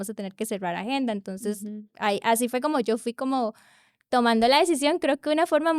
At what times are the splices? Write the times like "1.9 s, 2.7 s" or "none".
none